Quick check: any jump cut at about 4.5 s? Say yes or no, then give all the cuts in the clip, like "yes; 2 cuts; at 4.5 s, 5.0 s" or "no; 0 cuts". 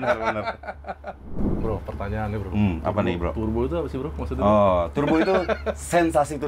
no; 1 cut; at 1.4 s